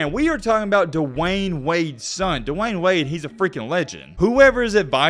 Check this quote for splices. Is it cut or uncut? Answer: cut